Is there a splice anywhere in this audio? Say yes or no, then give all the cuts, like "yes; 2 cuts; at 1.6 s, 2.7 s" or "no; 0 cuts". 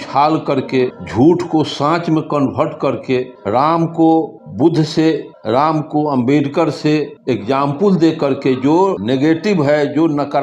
yes; 6 cuts; at 1.0 s, 3.3 s, 4.4 s, 5.3 s, 7.1 s, 9.0 s